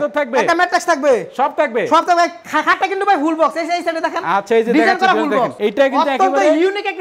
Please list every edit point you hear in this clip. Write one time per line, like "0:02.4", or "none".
none

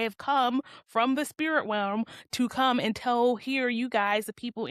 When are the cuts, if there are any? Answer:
none

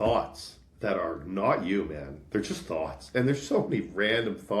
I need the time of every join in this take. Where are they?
none

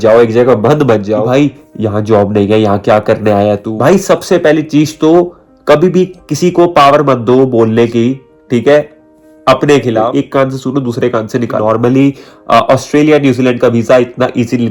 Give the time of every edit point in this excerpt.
0:01.2
0:03.7
0:10.1
0:11.6

